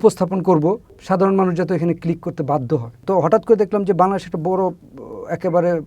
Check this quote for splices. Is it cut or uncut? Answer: cut